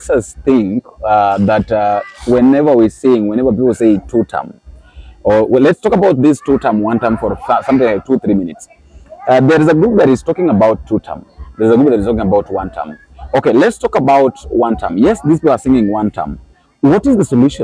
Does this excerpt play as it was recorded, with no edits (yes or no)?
yes